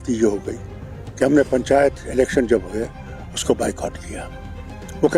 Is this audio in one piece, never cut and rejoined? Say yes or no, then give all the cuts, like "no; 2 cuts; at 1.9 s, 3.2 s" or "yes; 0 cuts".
yes; 0 cuts